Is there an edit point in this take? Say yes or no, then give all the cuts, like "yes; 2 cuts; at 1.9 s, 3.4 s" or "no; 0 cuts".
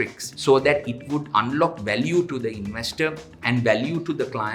yes; 1 cut; at 3.3 s